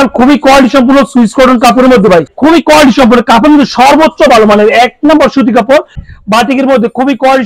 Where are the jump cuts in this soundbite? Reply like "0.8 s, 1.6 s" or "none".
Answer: 2.3 s, 6.0 s